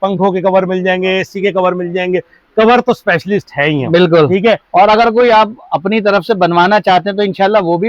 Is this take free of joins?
yes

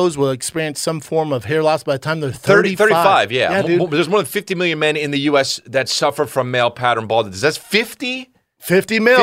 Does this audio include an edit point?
no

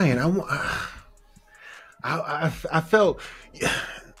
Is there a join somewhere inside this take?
no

